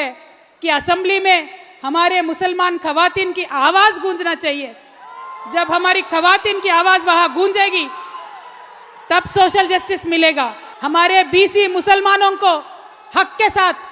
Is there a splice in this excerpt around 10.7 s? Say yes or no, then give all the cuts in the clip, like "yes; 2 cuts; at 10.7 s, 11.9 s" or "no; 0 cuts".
yes; 1 cut; at 10.7 s